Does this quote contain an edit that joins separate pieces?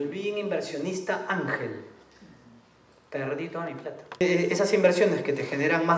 yes; 1 cut; at 4.2 s

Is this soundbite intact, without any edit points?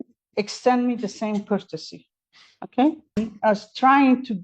no; 1 cut; at 3.2 s

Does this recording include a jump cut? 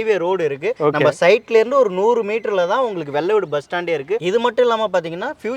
yes; 1 cut; at 4.2 s

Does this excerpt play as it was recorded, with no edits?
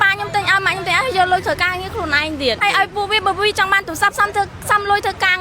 no; 1 cut; at 2.6 s

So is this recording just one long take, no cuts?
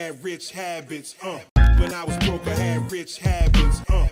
yes; 0 cuts

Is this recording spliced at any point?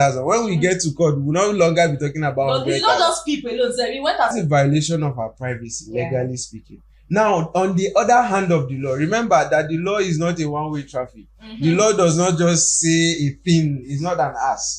yes; 1 cut; at 4.3 s

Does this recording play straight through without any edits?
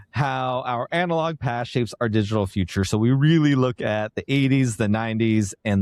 yes; 0 cuts

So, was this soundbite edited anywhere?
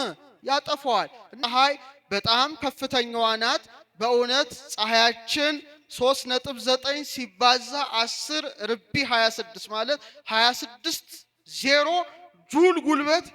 yes; 1 cut; at 1.3 s

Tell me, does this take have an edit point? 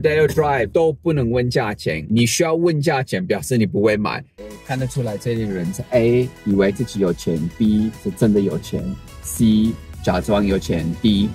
yes; 1 cut; at 4.2 s

